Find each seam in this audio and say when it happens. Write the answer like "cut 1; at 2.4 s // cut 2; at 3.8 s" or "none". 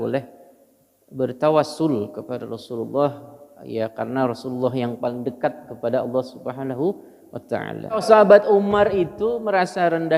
cut 1; at 8.0 s